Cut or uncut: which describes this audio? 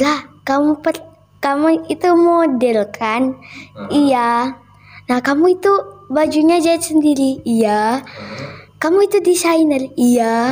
uncut